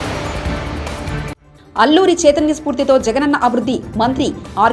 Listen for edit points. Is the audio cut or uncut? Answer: cut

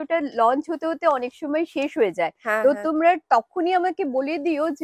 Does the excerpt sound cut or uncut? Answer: uncut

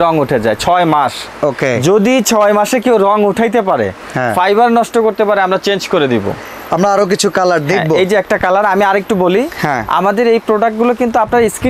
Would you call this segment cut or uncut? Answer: uncut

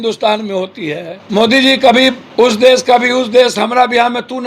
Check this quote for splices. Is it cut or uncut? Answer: cut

